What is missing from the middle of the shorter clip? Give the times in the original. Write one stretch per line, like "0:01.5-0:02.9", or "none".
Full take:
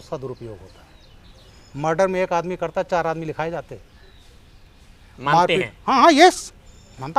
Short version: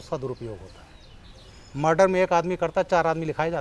none